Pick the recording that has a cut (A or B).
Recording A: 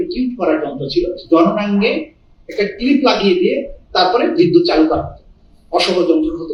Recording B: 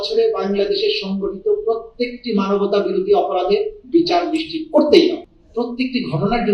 B